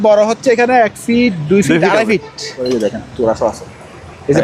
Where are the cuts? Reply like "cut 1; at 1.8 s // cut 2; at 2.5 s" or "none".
cut 1; at 2.6 s